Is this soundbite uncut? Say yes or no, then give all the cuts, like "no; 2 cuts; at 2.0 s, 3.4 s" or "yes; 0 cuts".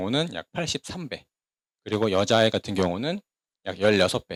yes; 0 cuts